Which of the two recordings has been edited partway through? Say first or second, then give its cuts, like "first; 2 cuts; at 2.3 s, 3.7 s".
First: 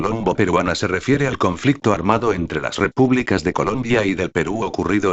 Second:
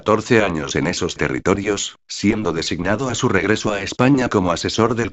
second; 1 cut; at 4.2 s